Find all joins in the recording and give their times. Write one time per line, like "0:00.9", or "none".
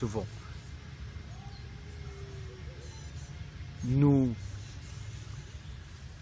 0:01.9